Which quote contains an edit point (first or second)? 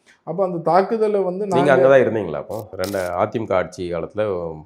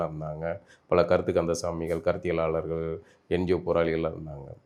first